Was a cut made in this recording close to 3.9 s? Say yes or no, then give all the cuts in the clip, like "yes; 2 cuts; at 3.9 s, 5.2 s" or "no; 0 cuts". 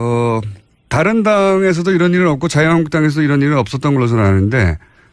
no; 1 cut; at 1.8 s